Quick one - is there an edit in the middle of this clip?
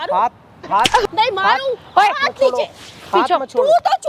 no; 0 cuts

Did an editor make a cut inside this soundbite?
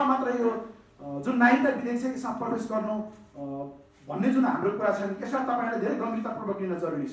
no; 0 cuts

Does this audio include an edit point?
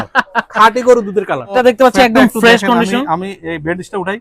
yes; 1 cut; at 1.5 s

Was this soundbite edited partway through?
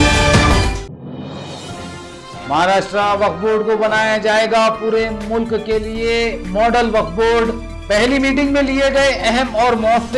yes; 1 cut; at 1.8 s

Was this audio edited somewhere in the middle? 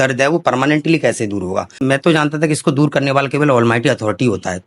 yes; 1 cut; at 1.7 s

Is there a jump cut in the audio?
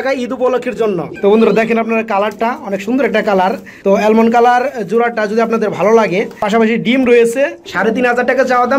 yes; 2 cuts; at 1.1 s, 7.6 s

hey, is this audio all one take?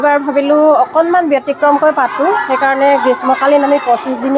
yes; 0 cuts

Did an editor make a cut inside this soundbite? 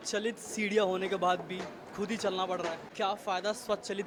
no; 0 cuts

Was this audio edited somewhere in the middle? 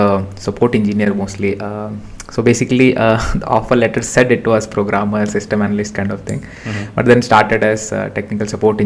no; 0 cuts

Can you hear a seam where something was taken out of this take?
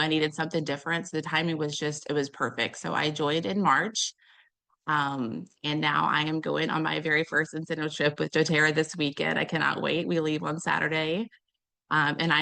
no; 0 cuts

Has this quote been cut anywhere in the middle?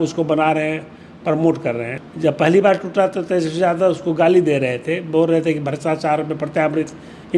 yes; 1 cut; at 2.0 s

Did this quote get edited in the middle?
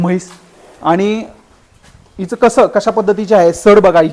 no; 0 cuts

